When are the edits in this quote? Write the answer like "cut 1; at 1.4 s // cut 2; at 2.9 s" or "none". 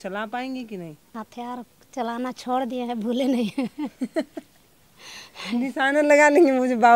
cut 1; at 1.0 s

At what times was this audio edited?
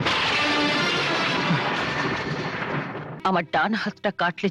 cut 1; at 3.0 s

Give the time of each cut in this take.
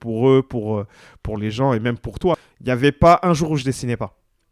cut 1; at 2.5 s

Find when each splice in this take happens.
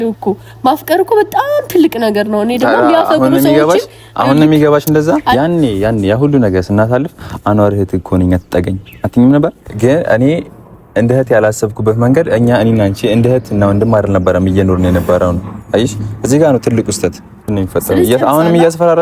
cut 1; at 5.3 s // cut 2; at 9.6 s // cut 3; at 17.5 s

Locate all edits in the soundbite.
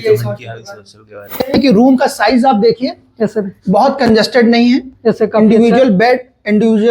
cut 1; at 1.3 s

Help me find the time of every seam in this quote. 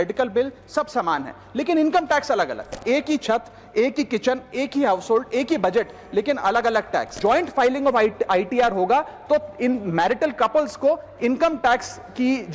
cut 1; at 2.8 s // cut 2; at 7.1 s

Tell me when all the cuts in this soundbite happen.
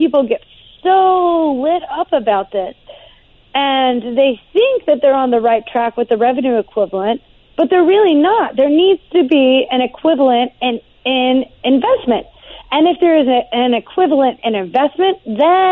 none

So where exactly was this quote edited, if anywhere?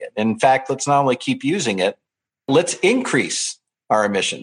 cut 1; at 2.4 s

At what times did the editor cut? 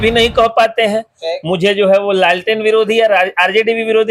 none

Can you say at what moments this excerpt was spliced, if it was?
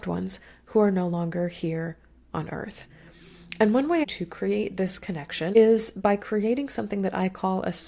cut 1; at 4.0 s // cut 2; at 5.6 s

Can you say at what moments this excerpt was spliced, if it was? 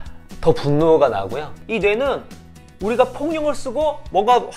cut 1; at 1.5 s

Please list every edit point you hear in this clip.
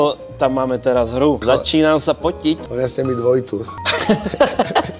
cut 1; at 1.4 s // cut 2; at 2.7 s // cut 3; at 3.8 s

